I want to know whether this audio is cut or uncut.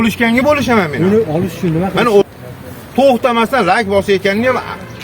cut